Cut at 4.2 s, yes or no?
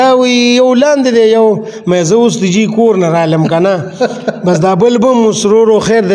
no